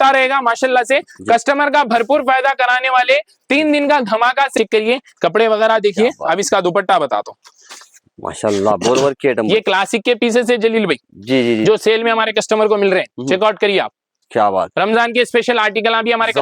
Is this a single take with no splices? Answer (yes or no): no